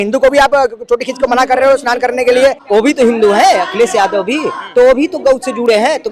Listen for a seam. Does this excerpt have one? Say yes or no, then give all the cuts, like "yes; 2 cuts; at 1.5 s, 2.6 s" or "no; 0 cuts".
yes; 1 cut; at 2.6 s